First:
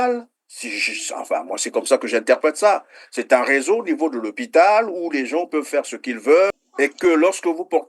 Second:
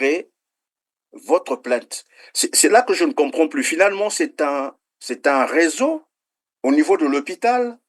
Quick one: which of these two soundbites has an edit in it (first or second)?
first